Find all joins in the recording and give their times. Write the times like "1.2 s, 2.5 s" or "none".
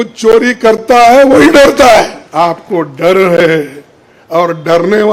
2.2 s